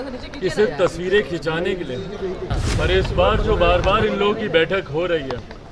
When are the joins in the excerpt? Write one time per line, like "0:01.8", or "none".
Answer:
0:02.5